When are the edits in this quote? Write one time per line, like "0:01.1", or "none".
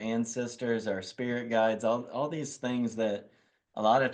none